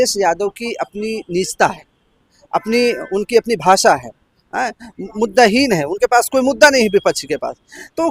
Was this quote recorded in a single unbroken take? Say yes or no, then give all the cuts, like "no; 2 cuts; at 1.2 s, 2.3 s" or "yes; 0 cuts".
yes; 0 cuts